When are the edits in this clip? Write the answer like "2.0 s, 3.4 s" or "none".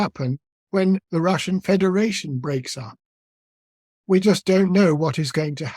1.0 s